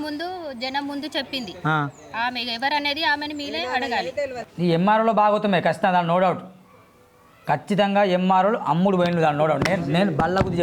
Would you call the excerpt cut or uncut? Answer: cut